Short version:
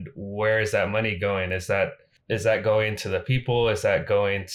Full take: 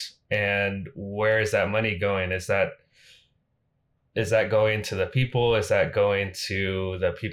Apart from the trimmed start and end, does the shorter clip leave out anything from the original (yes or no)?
yes